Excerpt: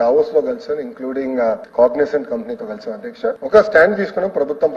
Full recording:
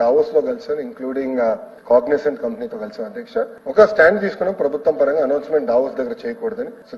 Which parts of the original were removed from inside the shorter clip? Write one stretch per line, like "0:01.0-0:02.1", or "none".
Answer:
0:01.7-0:01.8
0:03.5-0:03.7